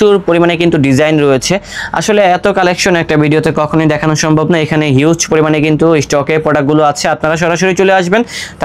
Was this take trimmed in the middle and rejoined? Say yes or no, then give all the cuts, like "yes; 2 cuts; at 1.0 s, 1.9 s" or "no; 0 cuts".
no; 0 cuts